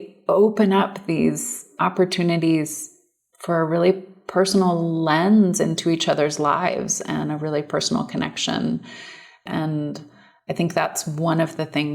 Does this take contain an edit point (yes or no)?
yes